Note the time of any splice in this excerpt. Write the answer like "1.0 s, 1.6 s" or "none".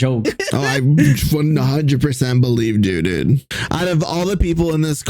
3.5 s

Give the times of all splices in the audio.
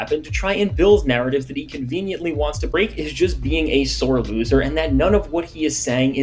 2.7 s

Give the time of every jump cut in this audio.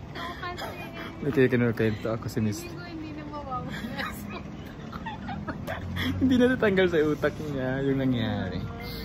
none

